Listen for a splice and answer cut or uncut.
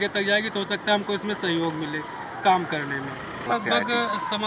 cut